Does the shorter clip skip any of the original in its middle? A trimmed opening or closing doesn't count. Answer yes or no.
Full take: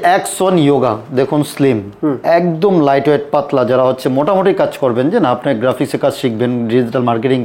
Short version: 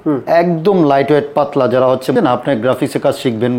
yes